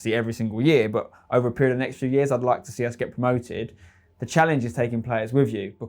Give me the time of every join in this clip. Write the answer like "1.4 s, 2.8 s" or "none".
none

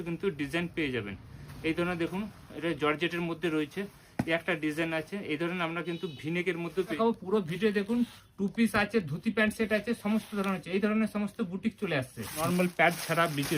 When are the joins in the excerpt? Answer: 7.0 s, 12.4 s

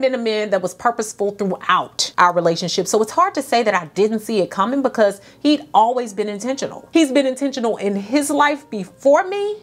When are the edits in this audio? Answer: 2.0 s, 6.7 s

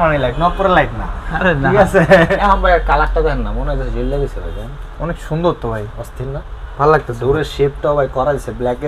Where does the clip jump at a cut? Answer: 2.4 s

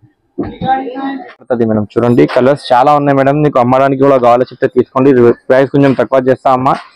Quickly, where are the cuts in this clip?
1.5 s

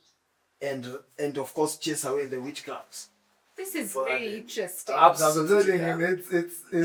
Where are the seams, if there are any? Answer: none

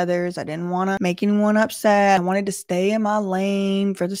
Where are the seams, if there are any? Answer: 1.0 s, 2.2 s

